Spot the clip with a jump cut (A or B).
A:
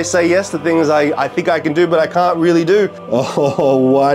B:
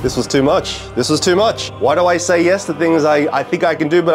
A